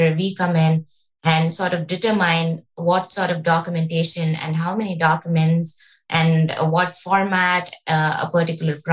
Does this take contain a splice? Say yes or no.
no